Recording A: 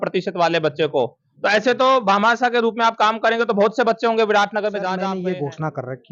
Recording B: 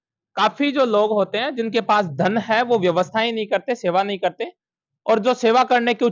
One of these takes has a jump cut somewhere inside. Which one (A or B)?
A